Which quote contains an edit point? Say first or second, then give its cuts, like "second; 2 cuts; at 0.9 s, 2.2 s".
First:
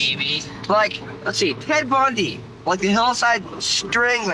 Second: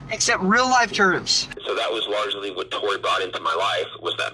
second; 1 cut; at 1.5 s